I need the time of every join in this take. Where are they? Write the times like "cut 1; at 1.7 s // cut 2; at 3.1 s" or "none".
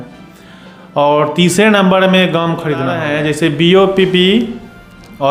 cut 1; at 2.9 s